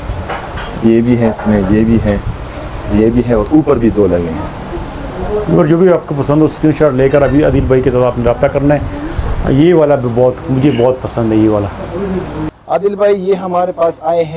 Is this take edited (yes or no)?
no